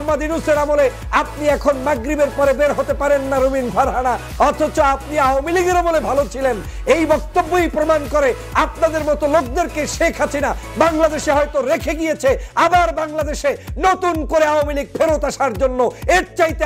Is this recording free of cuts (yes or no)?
yes